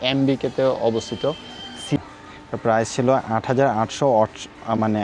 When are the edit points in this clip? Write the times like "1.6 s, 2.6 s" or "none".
2.0 s